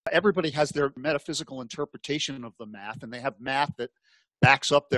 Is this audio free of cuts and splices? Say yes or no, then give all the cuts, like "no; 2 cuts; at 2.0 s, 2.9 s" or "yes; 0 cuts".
no; 1 cut; at 1.0 s